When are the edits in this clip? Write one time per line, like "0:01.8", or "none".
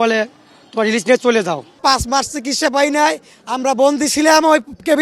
0:01.7